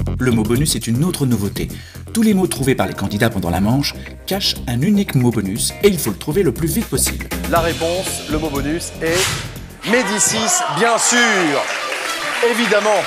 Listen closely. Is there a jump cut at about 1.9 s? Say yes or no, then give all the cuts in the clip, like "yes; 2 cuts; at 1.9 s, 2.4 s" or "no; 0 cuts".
no; 1 cut; at 7.8 s